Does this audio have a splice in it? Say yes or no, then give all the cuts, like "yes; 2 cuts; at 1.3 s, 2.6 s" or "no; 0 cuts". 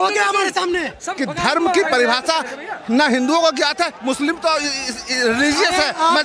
yes; 1 cut; at 1.1 s